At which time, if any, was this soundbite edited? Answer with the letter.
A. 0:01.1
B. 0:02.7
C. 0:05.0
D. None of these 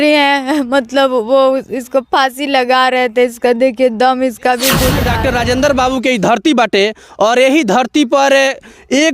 C